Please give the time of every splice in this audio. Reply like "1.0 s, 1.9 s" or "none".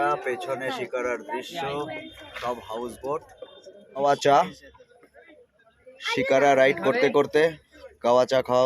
4.0 s

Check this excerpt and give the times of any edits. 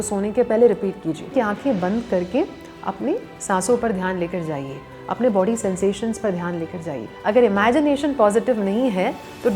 1.3 s, 7.1 s

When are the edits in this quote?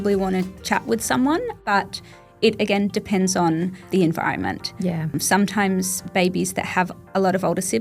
1.6 s, 3.9 s, 5.1 s

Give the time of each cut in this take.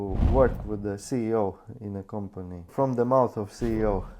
2.7 s

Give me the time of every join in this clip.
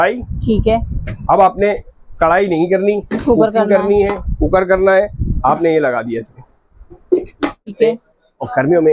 7.7 s

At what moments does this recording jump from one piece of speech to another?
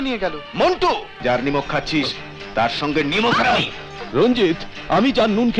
1.1 s

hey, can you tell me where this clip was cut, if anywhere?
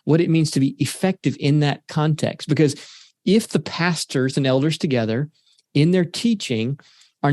none

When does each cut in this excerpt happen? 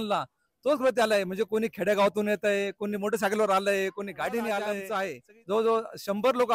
4.8 s

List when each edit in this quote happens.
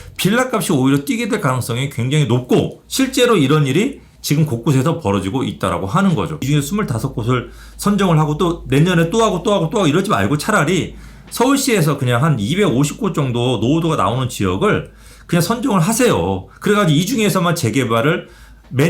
6.4 s

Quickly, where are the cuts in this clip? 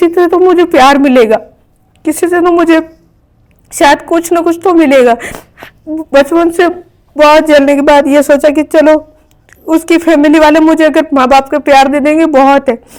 none

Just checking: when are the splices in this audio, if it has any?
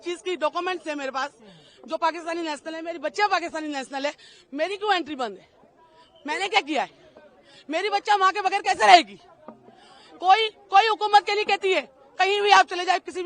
none

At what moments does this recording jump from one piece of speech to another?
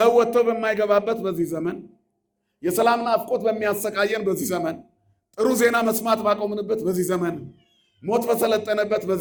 none

